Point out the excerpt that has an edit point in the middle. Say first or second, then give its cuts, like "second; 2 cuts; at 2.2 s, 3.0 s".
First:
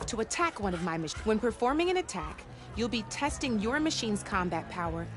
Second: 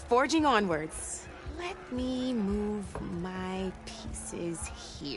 first; 2 cuts; at 1.1 s, 4.1 s